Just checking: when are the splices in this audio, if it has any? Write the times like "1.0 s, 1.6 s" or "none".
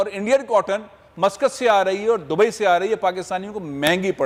none